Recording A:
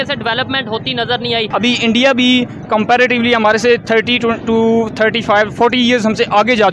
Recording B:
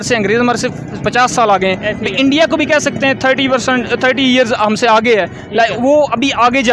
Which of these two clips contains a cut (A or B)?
A